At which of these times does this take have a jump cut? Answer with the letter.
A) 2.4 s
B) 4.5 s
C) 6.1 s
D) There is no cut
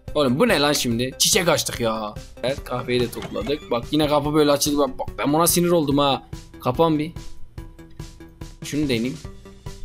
A